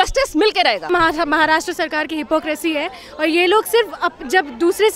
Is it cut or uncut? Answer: cut